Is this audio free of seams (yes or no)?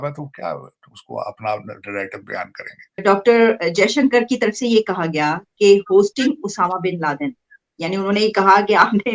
no